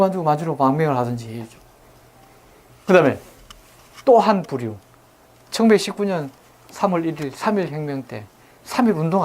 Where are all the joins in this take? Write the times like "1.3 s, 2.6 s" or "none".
5.4 s